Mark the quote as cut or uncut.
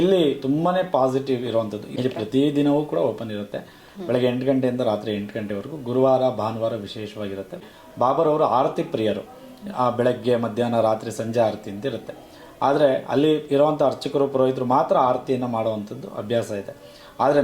cut